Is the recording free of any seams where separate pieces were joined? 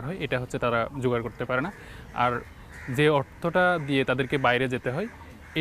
yes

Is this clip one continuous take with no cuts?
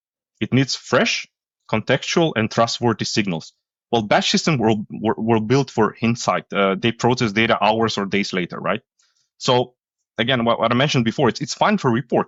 yes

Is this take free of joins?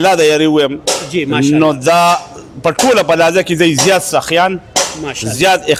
yes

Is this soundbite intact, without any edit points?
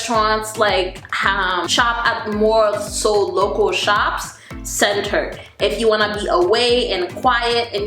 no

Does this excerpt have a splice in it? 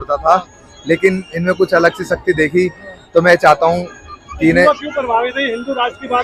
no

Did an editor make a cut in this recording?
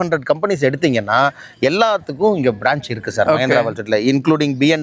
no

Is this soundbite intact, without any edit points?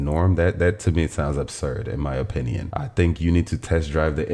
no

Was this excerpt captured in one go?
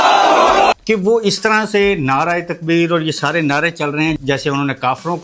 no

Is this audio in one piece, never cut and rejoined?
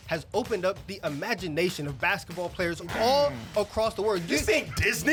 yes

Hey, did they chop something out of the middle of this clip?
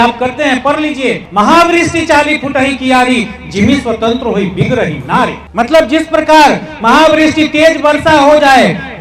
yes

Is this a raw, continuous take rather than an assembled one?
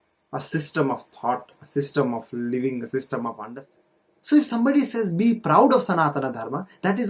no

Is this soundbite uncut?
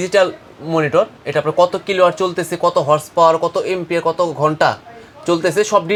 yes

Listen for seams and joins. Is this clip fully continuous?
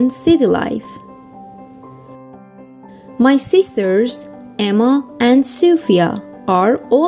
no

